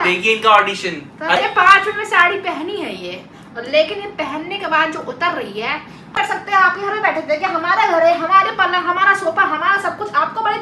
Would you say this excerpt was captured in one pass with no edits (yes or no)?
no